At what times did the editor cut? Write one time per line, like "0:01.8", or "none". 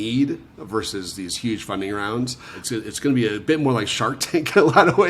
0:02.6